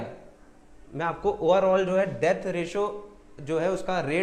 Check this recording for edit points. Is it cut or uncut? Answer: uncut